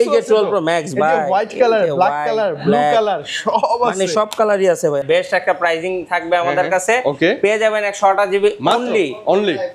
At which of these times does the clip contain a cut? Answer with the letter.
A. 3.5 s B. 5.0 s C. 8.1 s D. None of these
B